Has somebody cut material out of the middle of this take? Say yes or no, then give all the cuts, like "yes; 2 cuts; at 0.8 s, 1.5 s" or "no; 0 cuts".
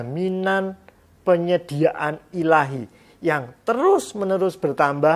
no; 0 cuts